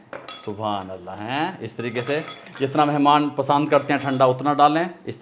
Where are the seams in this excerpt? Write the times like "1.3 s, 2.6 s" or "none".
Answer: none